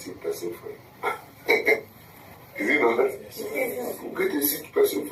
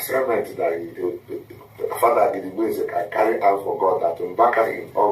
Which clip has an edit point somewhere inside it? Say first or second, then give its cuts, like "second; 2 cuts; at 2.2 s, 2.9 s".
second; 1 cut; at 0.9 s